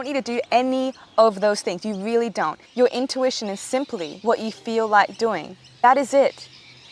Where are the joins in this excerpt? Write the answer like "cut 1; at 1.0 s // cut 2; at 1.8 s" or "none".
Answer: cut 1; at 2.6 s // cut 2; at 4.1 s // cut 3; at 5.8 s